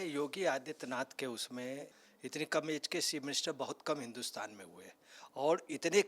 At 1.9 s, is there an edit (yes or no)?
yes